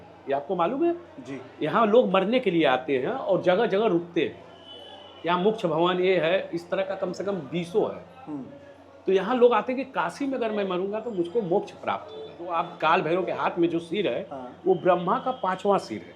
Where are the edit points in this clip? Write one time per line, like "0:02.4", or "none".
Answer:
0:12.5